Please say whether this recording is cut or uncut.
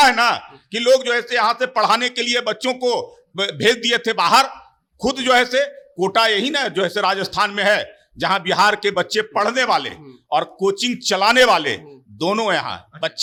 uncut